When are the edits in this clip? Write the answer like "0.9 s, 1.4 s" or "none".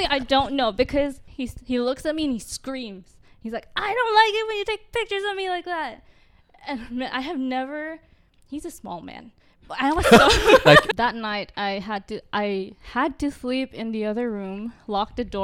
1.2 s, 10.9 s